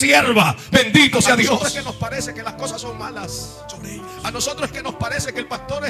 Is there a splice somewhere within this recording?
yes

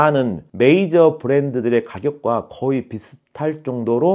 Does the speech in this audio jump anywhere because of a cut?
no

